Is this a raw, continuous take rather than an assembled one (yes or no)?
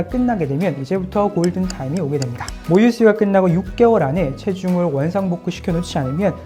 yes